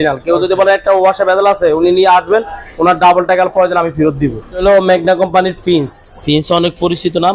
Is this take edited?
yes; 2 cuts; at 4.6 s, 6.1 s

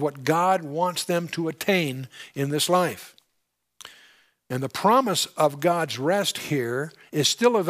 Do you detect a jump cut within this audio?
yes; 1 cut; at 5.3 s

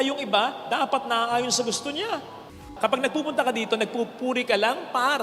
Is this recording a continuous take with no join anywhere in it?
no; 1 cut; at 2.7 s

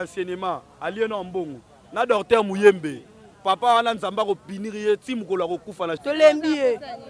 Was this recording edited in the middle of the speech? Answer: yes; 1 cut; at 6.0 s

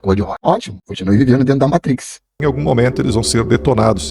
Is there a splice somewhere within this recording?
yes; 1 cut; at 2.4 s

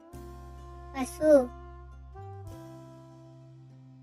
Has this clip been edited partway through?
yes; 1 cut; at 0.9 s

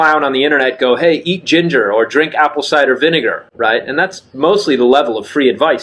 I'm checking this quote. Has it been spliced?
no; 0 cuts

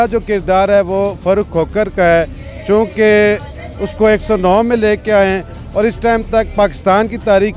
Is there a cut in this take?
no; 0 cuts

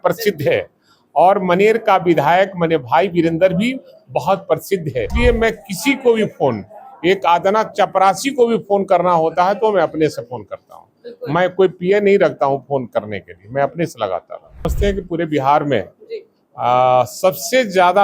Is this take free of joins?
no; 2 cuts; at 5.1 s, 14.7 s

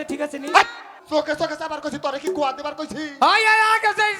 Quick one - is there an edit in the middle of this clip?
yes; 1 cut; at 0.9 s

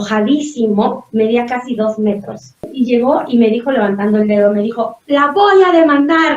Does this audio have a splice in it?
yes; 1 cut; at 2.7 s

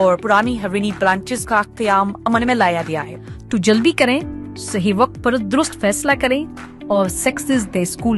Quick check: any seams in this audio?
yes; 1 cut; at 3.1 s

